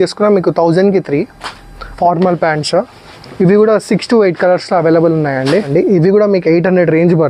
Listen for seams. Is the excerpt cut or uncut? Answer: cut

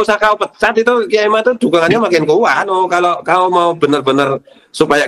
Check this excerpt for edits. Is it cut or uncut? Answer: cut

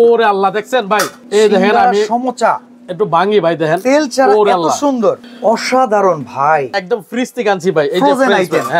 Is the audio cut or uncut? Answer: cut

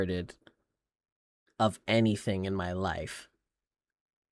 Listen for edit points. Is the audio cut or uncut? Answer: uncut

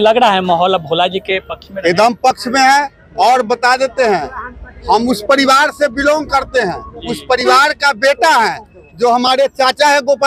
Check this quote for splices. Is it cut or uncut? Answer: uncut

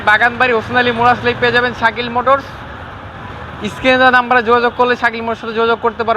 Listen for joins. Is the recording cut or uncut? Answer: uncut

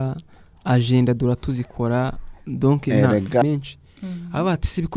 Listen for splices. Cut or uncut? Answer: cut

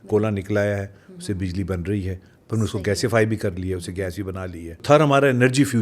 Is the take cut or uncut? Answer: cut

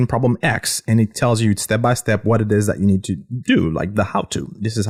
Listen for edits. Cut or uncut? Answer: uncut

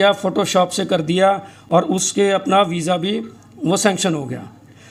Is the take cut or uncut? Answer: uncut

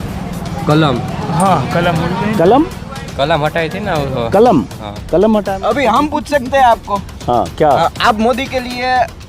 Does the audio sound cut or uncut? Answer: cut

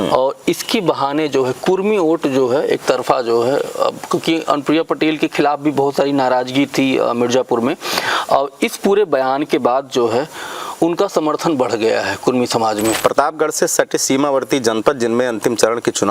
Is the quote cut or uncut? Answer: cut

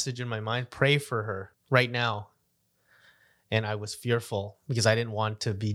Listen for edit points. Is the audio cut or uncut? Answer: cut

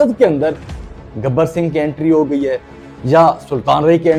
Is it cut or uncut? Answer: uncut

